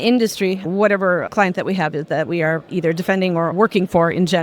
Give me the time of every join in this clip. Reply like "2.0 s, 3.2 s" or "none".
1.2 s, 2.6 s